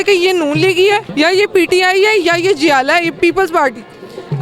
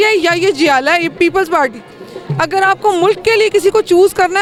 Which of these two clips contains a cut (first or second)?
first